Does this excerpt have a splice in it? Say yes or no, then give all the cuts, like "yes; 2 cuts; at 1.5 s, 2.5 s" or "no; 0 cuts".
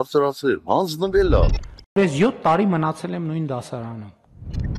no; 0 cuts